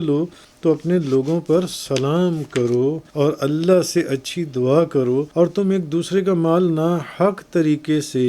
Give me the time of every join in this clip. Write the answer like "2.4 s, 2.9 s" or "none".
3.0 s, 5.3 s